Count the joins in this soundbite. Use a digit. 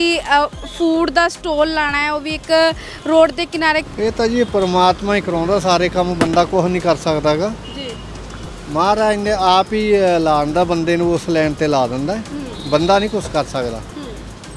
1